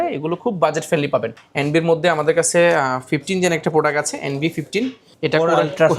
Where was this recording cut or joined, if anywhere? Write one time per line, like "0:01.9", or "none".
0:01.4
0:05.1